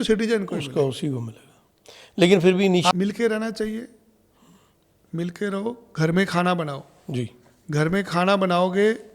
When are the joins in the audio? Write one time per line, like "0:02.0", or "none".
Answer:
0:02.9